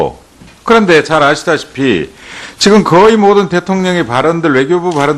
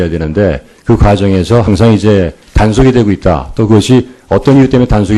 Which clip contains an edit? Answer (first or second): first